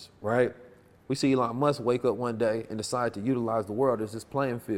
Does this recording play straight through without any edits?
yes; 0 cuts

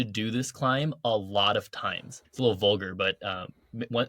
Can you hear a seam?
yes; 1 cut; at 2.1 s

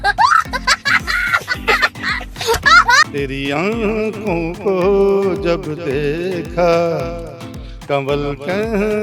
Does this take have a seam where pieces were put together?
yes; 1 cut; at 3.1 s

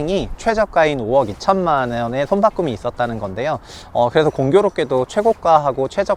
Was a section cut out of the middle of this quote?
no; 0 cuts

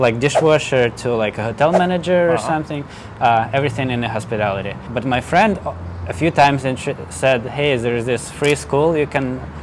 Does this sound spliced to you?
no; 0 cuts

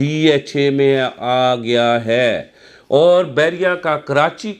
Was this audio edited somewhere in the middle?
no; 0 cuts

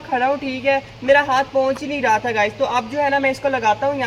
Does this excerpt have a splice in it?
no; 0 cuts

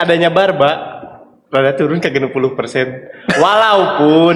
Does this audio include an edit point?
no; 0 cuts

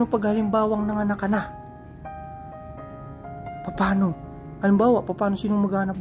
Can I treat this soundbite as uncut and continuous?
yes; 0 cuts

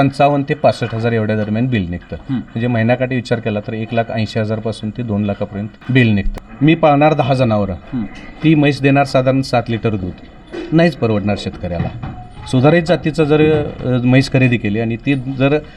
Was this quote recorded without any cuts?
no; 2 cuts; at 5.8 s, 6.3 s

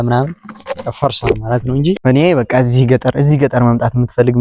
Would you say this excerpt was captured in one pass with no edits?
no; 1 cut; at 2.0 s

